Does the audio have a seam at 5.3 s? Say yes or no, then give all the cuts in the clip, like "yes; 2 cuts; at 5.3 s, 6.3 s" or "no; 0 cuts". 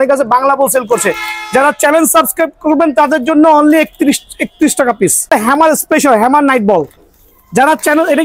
yes; 1 cut; at 5.3 s